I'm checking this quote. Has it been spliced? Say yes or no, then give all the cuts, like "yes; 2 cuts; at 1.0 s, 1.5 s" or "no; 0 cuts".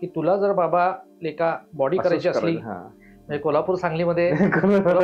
no; 0 cuts